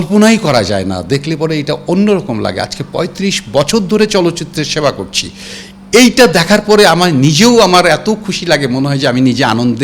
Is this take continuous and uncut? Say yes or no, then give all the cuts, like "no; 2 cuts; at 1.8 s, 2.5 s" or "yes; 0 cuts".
yes; 0 cuts